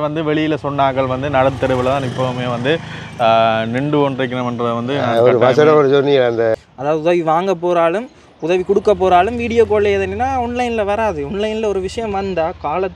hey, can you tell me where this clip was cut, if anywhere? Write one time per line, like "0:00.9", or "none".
0:06.5